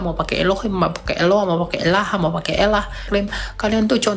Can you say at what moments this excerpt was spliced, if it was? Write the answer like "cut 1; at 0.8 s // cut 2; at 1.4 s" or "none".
cut 1; at 3.1 s